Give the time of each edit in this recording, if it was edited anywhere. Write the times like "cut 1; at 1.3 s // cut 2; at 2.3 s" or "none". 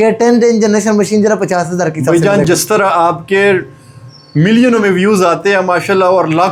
none

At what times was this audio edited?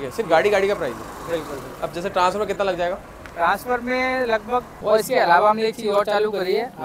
cut 1; at 4.7 s

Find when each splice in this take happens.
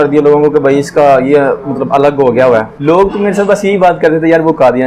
cut 1; at 2.7 s

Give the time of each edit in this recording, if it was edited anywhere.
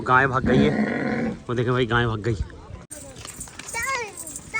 cut 1; at 2.9 s

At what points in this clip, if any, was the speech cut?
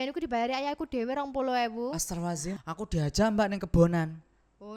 cut 1; at 2.5 s

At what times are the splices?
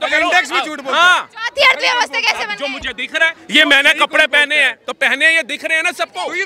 none

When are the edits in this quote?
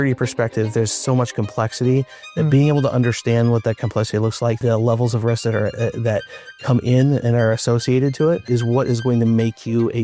cut 1; at 4.6 s // cut 2; at 8.4 s

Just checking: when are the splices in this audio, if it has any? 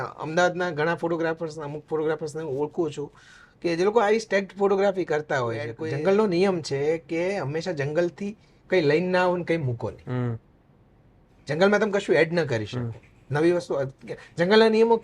cut 1; at 5.7 s

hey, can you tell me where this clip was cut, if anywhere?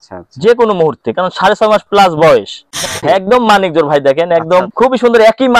cut 1; at 2.9 s // cut 2; at 4.7 s

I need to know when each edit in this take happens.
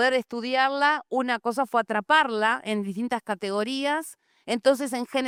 none

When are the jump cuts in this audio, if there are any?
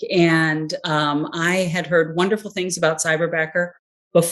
none

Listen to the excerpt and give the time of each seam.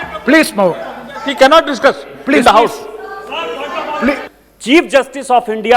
cut 1; at 4.2 s

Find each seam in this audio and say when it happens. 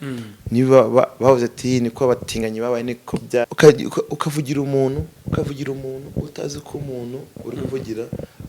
cut 1; at 3.5 s

